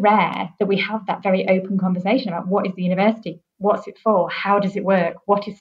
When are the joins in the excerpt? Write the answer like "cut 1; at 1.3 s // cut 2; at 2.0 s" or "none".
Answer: none